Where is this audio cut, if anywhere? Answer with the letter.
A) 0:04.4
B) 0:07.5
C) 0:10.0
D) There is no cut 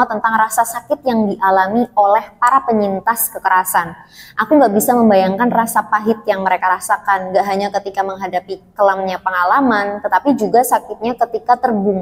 D